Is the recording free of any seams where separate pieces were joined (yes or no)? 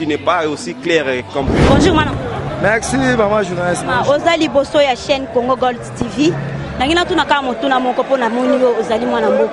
yes